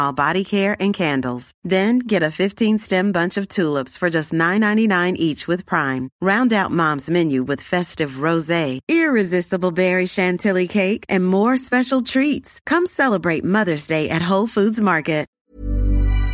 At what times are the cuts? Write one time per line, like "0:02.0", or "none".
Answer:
0:15.4